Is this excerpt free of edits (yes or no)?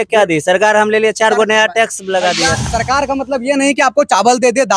no